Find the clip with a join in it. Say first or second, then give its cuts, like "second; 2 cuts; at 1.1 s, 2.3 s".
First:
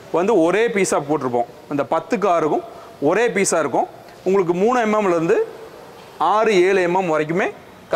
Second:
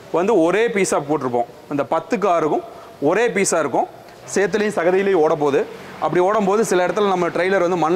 second; 1 cut; at 4.1 s